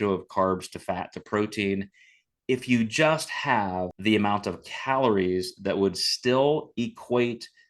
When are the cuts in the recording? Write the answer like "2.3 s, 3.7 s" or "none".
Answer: 3.9 s